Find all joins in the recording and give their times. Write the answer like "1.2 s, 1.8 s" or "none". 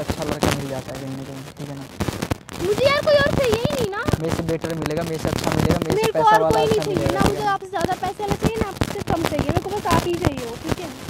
none